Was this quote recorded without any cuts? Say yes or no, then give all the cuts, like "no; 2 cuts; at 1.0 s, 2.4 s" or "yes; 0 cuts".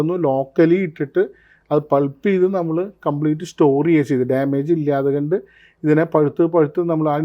yes; 0 cuts